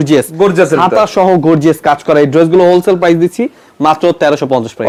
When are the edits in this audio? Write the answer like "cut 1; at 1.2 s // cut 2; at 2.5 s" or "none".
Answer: none